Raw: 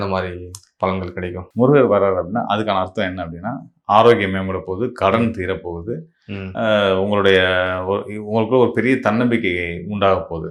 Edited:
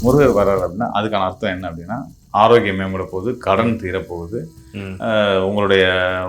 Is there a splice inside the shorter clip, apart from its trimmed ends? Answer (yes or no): no